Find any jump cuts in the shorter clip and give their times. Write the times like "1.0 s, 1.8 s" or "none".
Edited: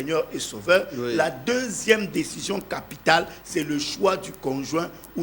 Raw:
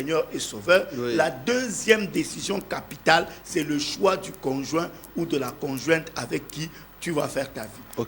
none